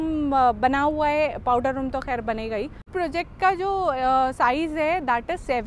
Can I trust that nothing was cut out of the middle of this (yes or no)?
no